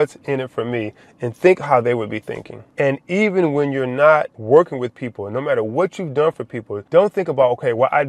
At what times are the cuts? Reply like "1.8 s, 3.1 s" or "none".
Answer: none

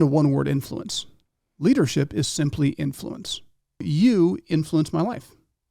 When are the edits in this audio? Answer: 3.8 s

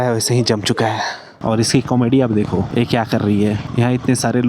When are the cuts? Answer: 1.2 s, 3.6 s

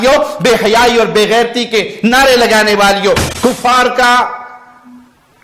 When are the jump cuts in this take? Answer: 3.2 s

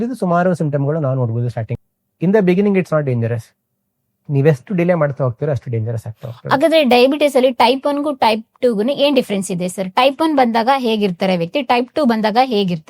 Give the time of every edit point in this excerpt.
1.6 s

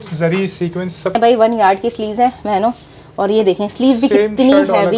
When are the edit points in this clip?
1.2 s

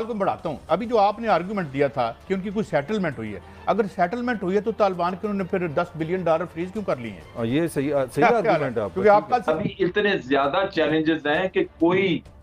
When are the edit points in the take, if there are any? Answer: 9.5 s

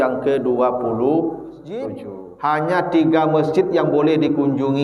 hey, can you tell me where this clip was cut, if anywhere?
2.0 s

